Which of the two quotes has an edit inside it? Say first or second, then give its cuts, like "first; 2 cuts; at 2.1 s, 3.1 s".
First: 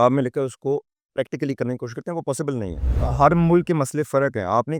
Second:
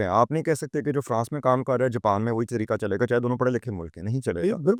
first; 1 cut; at 3.0 s